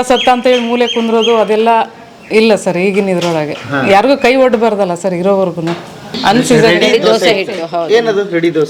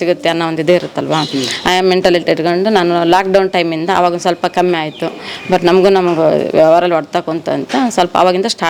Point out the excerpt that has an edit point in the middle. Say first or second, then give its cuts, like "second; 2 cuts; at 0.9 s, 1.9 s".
first; 1 cut; at 6.1 s